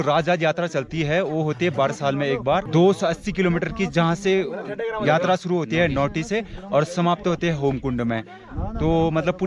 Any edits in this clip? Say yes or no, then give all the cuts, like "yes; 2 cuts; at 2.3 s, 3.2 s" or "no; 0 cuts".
yes; 1 cut; at 2.7 s